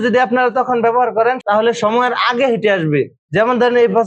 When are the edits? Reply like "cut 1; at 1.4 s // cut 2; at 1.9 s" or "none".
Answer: cut 1; at 1.4 s